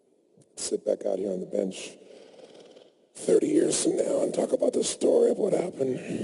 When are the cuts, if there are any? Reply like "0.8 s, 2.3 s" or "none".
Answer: 2.8 s